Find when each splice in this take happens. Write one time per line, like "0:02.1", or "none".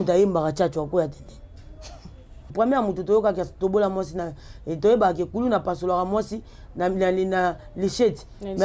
0:02.5